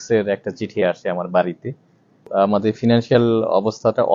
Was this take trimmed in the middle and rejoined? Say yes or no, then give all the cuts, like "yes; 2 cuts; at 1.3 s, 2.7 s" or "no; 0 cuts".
yes; 1 cut; at 2.3 s